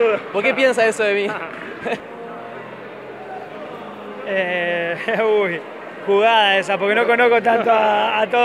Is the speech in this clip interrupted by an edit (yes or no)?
yes